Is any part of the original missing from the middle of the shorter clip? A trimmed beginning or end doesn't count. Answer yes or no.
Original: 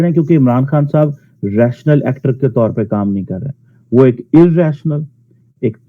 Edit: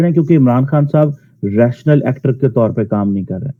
no